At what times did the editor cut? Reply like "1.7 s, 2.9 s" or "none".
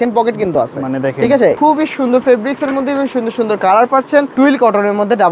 1.6 s, 4.3 s

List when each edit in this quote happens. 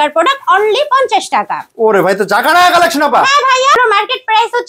3.8 s

